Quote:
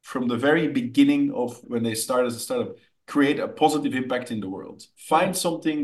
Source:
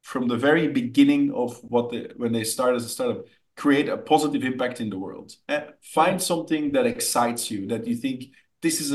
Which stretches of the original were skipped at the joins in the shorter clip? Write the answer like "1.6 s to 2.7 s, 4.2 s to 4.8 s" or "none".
1.6 s to 2.1 s, 5.4 s to 5.7 s